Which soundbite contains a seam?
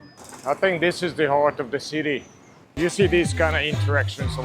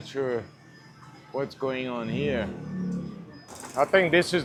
first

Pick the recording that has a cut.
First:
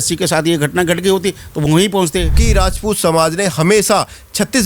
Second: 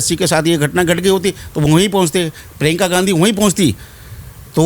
first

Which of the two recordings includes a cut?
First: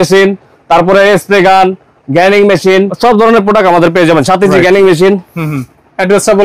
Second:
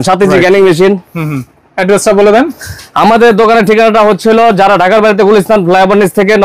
first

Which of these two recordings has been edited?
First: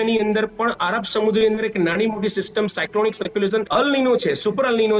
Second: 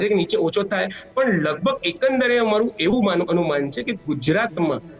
first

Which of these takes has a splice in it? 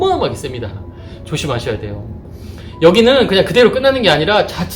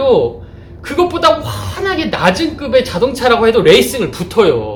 first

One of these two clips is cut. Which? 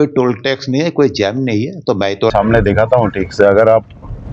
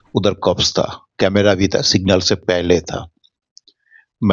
first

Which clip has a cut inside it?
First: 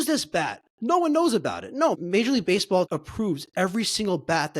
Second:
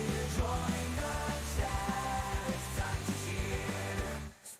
first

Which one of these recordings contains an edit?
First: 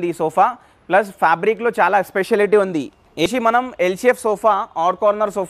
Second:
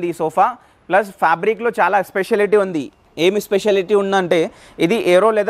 first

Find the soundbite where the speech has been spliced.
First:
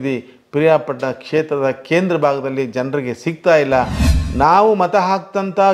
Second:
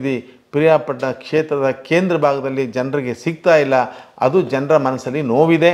first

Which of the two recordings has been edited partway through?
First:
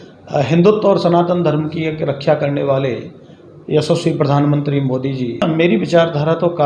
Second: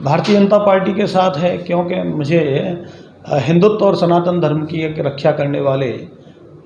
first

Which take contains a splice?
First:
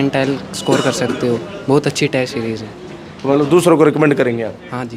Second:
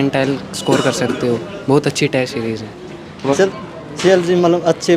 second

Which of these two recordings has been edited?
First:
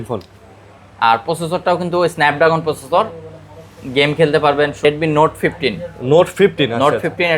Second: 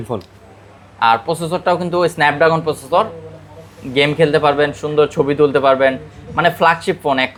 first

